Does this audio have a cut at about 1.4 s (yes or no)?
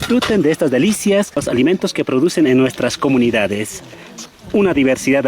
yes